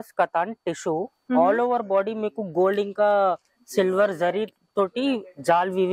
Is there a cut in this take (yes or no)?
no